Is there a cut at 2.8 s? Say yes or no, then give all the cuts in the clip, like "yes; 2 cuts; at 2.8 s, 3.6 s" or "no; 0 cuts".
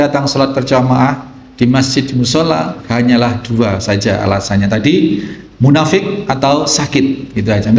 yes; 1 cut; at 2.8 s